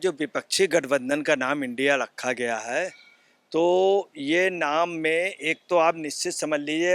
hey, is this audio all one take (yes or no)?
yes